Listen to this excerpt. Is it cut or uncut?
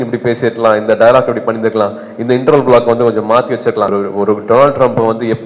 cut